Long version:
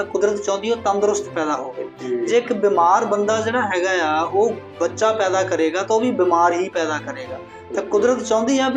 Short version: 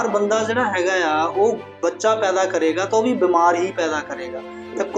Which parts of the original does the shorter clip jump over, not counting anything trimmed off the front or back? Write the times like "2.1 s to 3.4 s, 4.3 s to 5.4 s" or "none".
none